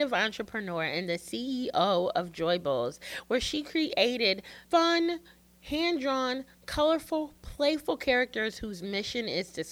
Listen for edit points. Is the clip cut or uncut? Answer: cut